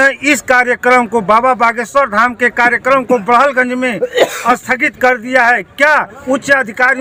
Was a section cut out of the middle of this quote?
no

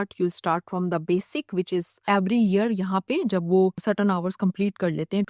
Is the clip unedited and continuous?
no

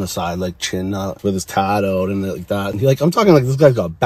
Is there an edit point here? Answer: yes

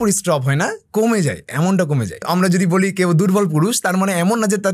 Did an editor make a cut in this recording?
yes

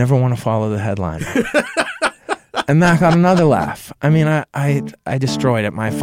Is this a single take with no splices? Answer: yes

